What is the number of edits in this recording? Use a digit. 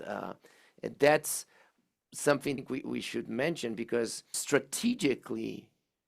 1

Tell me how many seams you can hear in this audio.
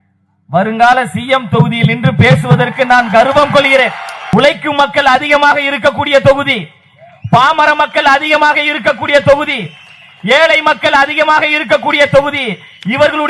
1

